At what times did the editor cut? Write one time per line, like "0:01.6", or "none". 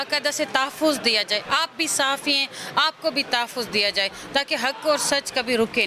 none